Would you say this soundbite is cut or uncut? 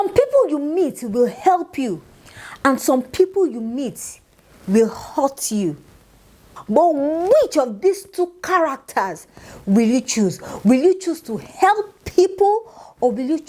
uncut